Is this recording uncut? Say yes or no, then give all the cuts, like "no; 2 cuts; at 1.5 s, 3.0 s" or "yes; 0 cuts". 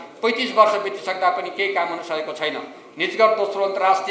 yes; 0 cuts